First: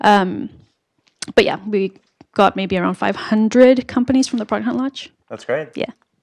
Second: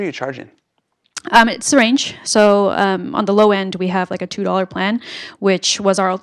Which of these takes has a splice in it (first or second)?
first